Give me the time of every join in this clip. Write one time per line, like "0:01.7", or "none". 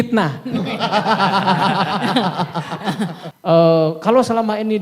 0:03.3